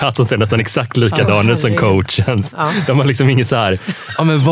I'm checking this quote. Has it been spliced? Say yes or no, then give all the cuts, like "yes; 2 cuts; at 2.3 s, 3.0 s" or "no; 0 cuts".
no; 0 cuts